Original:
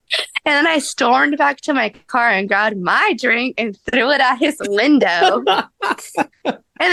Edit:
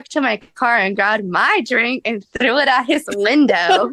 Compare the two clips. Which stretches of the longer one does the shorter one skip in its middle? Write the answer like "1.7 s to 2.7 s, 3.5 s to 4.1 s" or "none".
none